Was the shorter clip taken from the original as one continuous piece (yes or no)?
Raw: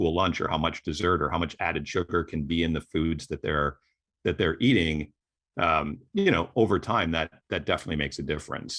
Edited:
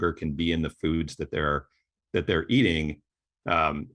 yes